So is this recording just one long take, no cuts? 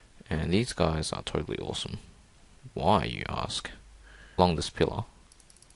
yes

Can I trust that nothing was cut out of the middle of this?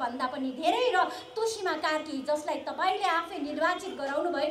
yes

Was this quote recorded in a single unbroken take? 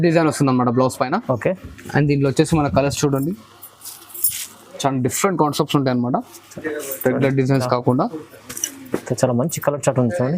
yes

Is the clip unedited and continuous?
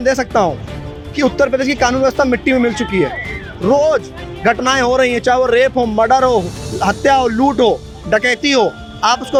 yes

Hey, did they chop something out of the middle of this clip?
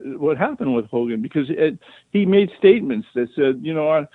no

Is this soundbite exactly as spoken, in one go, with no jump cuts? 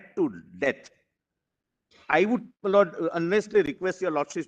yes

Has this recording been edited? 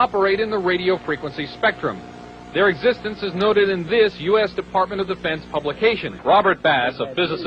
yes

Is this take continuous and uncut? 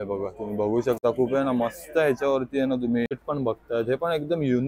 no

